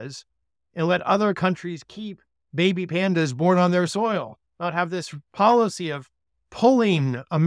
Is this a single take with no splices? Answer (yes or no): yes